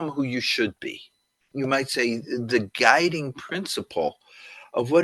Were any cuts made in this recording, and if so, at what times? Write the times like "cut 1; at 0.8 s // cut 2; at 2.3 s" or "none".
cut 1; at 1.4 s